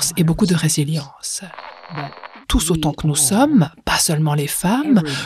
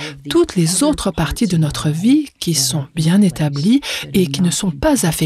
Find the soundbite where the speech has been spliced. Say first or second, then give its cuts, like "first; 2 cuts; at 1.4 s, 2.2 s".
first; 1 cut; at 2.1 s